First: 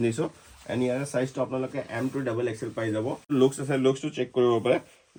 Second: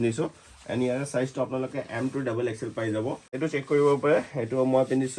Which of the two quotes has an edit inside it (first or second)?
second